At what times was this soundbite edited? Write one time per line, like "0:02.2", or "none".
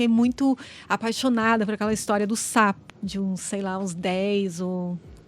0:02.8